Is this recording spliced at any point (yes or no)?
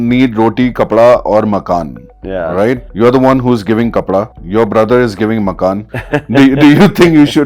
yes